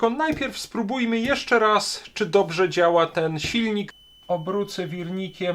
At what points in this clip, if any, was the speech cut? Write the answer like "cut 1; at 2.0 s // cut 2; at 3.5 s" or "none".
cut 1; at 4.0 s